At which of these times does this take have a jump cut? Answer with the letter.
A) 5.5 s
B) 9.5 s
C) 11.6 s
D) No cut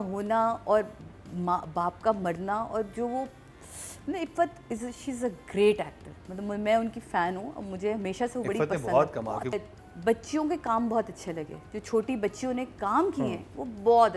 B